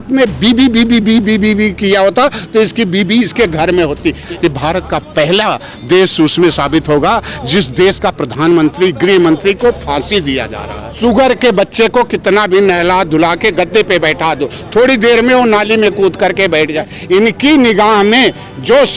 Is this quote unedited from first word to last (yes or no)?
no